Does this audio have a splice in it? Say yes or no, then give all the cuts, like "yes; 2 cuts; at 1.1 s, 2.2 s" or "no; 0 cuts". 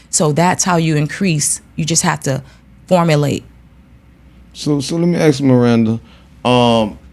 no; 0 cuts